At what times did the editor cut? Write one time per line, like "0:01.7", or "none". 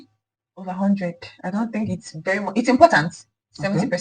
none